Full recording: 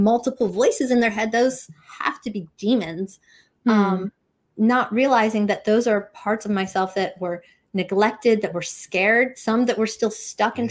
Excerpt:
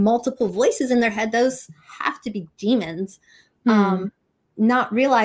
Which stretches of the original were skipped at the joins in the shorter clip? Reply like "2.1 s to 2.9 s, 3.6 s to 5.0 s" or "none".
none